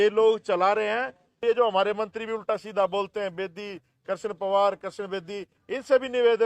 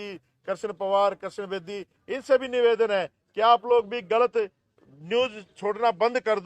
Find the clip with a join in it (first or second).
first